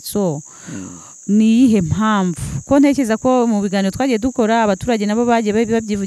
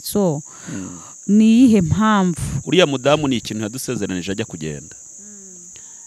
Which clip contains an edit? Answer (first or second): second